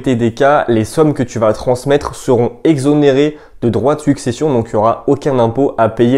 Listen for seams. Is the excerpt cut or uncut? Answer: uncut